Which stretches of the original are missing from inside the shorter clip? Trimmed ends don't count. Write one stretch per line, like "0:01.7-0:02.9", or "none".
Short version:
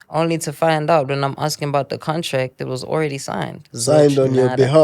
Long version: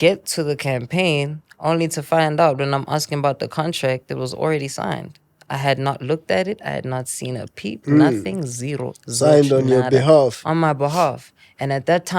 0:05.1-0:09.0